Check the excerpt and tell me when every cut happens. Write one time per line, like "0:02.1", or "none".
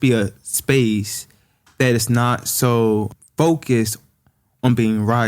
0:03.1